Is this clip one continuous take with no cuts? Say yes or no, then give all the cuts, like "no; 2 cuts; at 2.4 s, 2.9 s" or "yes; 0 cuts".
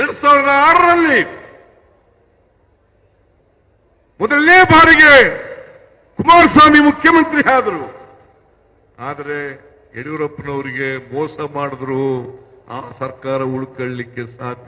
yes; 0 cuts